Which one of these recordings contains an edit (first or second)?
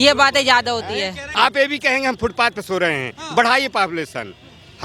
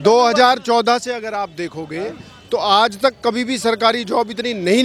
first